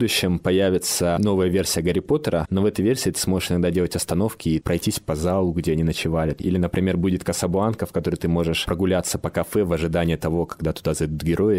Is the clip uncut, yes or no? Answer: no